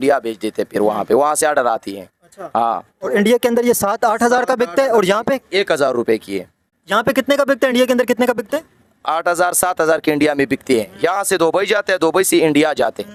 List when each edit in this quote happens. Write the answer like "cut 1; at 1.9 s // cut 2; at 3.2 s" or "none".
none